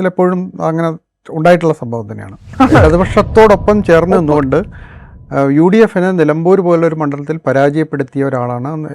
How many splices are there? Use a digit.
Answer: 1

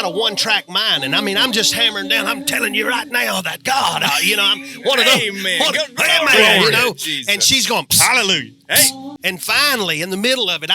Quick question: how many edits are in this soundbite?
1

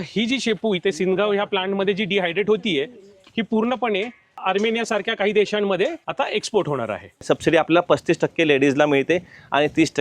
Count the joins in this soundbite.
3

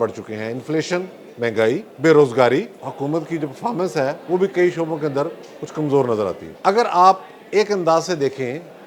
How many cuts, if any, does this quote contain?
3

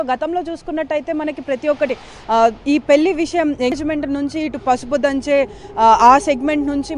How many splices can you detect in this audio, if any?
1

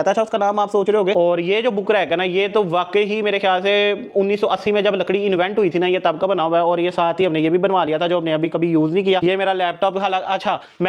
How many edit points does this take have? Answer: 2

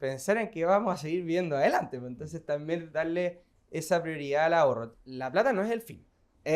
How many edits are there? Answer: 2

